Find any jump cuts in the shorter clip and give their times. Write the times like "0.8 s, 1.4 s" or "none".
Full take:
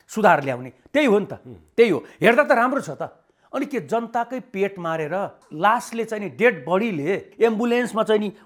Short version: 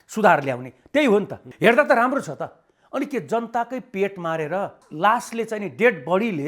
1.5 s